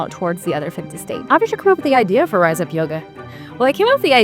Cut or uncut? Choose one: cut